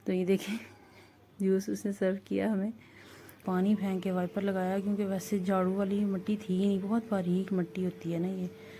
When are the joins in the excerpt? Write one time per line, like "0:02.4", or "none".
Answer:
0:03.4